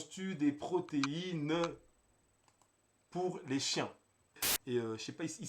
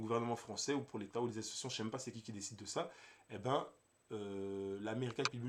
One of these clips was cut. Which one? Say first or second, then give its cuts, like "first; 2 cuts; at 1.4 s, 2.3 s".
first; 1 cut; at 4.5 s